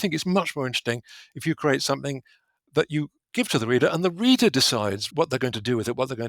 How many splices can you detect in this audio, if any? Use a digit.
1